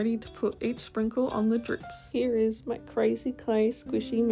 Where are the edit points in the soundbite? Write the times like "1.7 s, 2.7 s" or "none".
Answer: 1.9 s